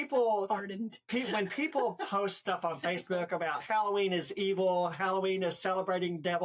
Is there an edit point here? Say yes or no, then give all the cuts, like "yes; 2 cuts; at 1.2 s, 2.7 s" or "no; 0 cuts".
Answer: no; 0 cuts